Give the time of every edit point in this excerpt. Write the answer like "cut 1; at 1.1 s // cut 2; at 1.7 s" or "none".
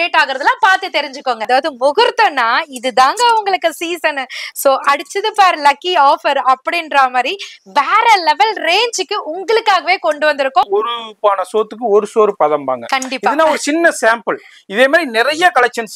cut 1; at 1.5 s // cut 2; at 10.7 s